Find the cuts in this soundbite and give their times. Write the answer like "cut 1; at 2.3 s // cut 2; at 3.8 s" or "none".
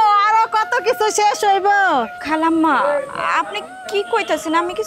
cut 1; at 2.2 s